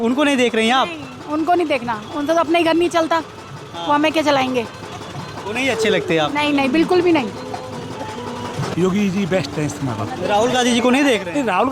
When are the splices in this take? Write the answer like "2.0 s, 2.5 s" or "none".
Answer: 8.7 s